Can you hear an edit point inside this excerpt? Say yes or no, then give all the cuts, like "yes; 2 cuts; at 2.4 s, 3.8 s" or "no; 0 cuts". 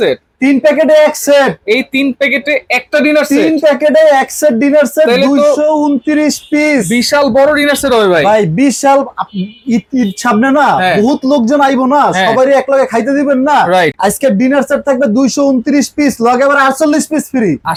no; 0 cuts